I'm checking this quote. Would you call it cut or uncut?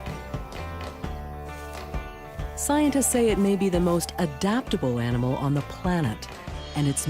cut